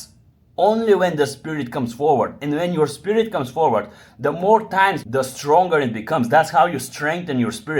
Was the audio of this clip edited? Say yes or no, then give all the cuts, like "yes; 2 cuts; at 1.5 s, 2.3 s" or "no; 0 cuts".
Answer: yes; 1 cut; at 5.0 s